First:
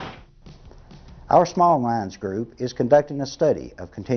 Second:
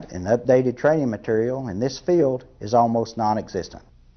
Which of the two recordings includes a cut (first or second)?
second